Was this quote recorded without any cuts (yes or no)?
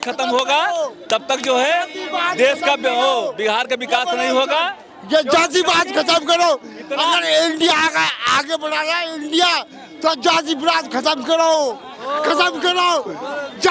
yes